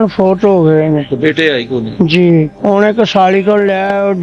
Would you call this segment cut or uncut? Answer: cut